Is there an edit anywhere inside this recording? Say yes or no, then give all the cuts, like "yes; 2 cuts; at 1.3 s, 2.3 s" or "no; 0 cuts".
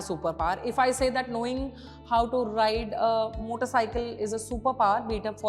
no; 0 cuts